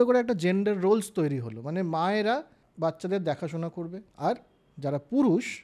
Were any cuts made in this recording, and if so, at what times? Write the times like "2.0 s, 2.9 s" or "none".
2.6 s, 4.0 s